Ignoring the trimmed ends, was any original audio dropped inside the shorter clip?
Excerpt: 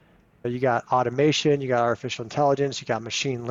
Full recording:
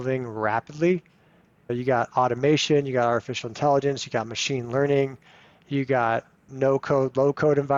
no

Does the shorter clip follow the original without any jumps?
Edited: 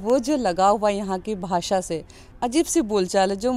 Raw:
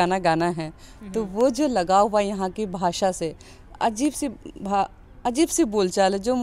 no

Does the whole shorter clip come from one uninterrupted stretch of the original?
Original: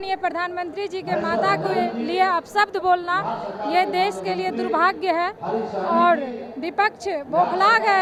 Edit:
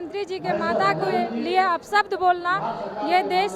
yes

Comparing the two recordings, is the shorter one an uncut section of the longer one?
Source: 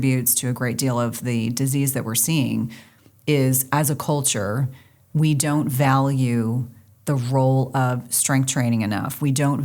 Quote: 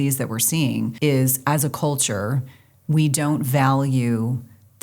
no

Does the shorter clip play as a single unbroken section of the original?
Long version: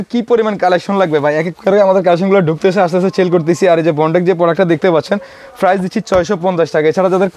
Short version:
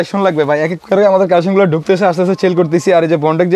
yes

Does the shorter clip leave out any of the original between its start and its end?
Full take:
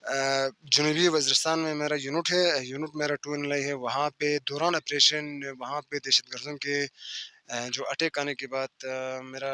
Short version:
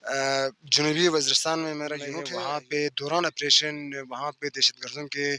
yes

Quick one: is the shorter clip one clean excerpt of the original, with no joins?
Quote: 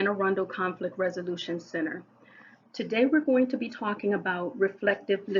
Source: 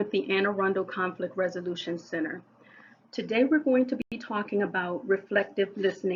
no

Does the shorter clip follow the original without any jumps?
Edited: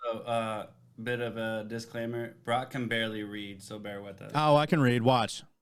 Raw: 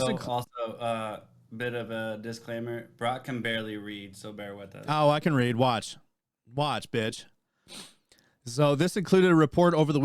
yes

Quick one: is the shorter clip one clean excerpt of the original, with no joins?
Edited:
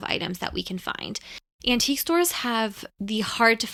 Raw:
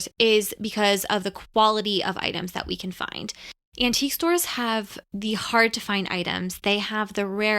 yes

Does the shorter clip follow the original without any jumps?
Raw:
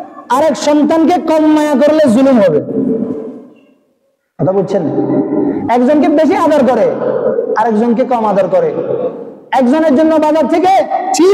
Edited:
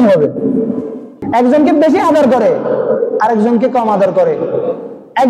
no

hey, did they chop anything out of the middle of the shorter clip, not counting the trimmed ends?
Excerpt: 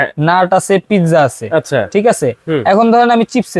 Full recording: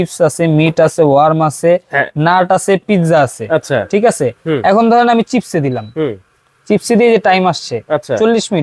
no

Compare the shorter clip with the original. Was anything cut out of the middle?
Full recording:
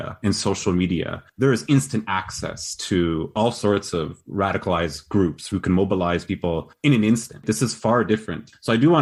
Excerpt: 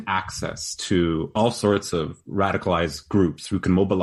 no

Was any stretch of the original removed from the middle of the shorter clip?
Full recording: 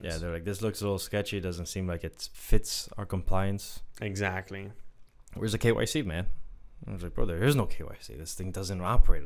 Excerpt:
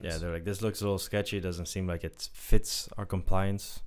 no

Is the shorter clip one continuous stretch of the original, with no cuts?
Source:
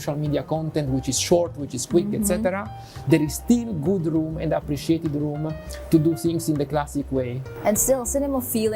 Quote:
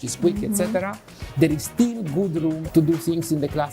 no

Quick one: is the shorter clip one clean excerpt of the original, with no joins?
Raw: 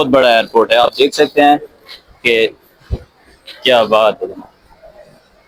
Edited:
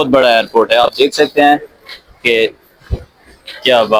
yes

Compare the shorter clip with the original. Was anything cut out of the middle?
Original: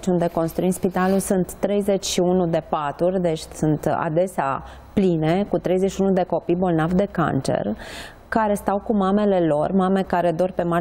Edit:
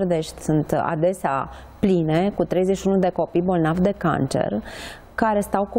no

